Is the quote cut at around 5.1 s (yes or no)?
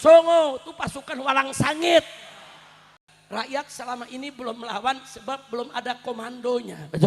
no